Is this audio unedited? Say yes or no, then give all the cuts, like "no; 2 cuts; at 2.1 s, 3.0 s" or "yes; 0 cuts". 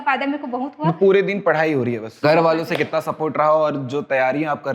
no; 1 cut; at 2.2 s